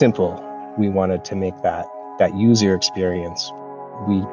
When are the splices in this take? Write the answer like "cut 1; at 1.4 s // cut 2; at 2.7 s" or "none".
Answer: cut 1; at 3.4 s